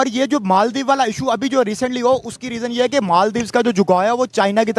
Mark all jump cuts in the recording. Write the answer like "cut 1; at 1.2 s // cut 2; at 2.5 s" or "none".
none